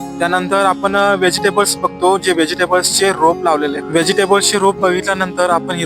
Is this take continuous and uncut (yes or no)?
no